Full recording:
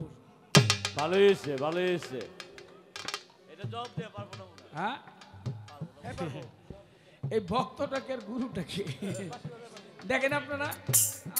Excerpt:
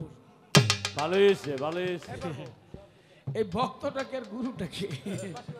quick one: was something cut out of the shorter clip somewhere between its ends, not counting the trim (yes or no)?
yes